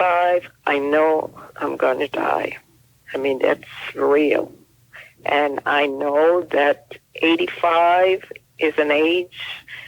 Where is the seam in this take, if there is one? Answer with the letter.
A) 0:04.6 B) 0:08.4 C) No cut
B